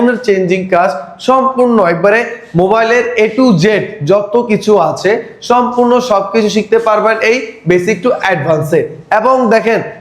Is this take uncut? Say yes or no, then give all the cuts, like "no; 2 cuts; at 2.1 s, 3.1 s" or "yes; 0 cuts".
yes; 0 cuts